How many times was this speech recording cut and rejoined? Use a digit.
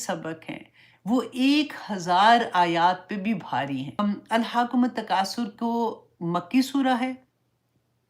1